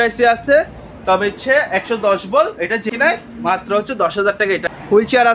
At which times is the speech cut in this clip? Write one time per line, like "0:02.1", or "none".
0:02.9
0:04.4